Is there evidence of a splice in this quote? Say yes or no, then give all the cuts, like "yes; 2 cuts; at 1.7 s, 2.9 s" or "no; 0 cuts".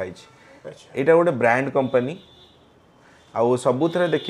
no; 0 cuts